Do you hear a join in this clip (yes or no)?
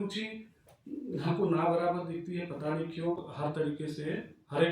yes